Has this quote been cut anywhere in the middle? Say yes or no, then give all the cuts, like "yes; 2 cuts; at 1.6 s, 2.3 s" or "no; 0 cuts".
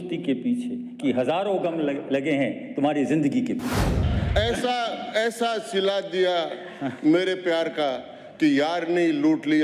yes; 1 cut; at 4.0 s